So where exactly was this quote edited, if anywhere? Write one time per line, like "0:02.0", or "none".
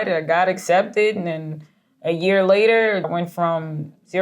0:03.1